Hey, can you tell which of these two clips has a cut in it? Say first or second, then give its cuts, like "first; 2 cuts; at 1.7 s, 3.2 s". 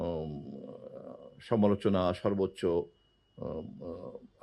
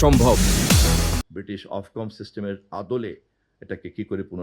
second; 1 cut; at 1.2 s